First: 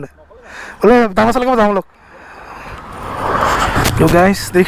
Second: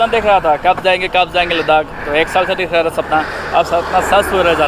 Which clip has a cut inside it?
first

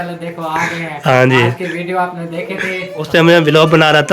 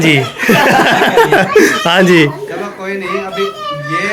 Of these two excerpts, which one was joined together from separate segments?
first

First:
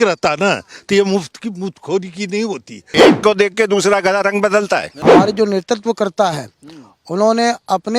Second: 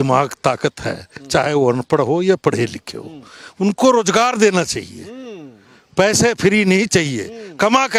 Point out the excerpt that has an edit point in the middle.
first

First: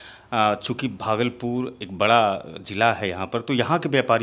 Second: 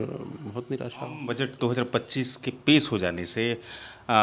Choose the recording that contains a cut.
second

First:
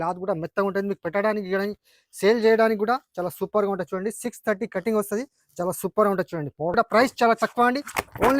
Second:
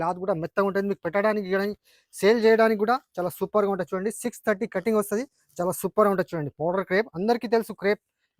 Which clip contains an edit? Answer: first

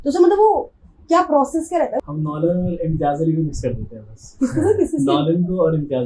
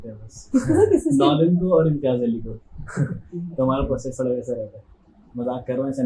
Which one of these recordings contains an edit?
first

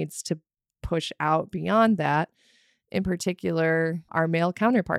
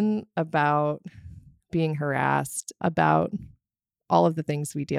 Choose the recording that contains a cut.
first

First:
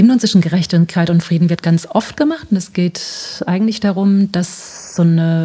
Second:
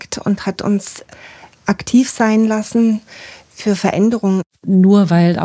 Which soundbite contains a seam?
second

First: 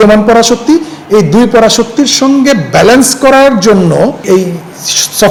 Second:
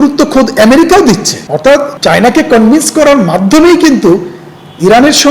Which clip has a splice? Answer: second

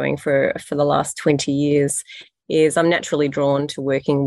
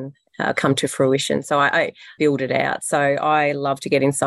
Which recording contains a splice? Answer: second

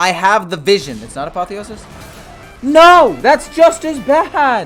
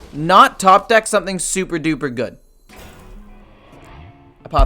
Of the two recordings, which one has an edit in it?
second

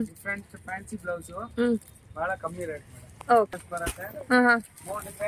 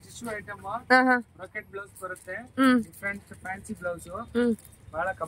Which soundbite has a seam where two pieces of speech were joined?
first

